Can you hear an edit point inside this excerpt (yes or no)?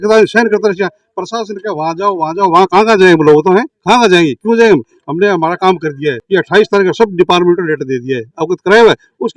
no